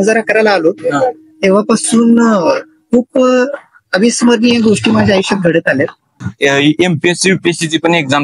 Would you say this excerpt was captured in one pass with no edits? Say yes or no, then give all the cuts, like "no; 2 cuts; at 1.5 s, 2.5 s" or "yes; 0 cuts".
no; 1 cut; at 6.2 s